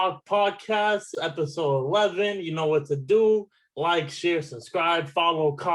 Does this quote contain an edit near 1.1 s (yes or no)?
yes